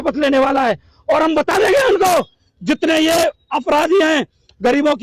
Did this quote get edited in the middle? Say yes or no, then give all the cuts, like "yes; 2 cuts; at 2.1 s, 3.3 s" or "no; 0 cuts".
no; 0 cuts